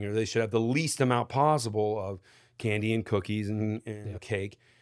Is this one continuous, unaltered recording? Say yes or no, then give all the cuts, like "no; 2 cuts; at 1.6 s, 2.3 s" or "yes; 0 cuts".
yes; 0 cuts